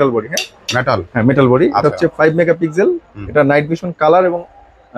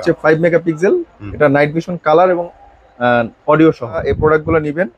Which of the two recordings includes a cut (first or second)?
second